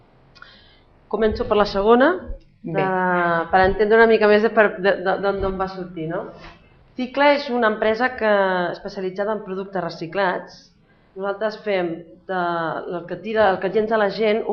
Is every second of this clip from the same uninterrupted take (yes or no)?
no